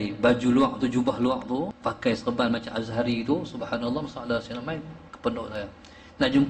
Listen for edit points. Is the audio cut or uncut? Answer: cut